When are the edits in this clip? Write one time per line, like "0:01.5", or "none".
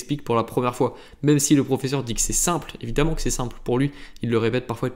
none